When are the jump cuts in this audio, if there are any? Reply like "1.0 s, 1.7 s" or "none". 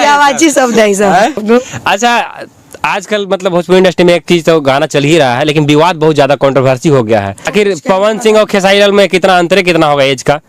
1.4 s, 7.5 s

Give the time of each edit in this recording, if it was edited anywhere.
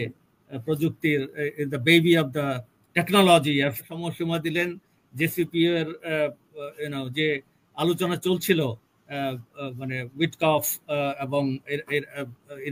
3.8 s

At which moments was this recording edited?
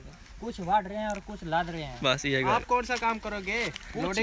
2.5 s

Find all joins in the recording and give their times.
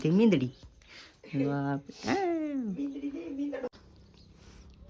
3.7 s

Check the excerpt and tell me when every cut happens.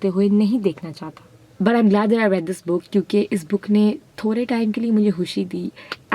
1.4 s

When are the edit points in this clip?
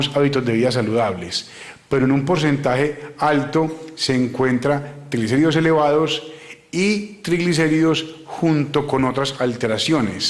7.2 s

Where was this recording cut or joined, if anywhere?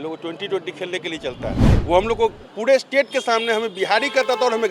1.7 s

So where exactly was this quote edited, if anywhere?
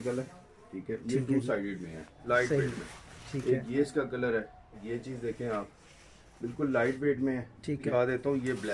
2.1 s, 4.9 s, 7.9 s

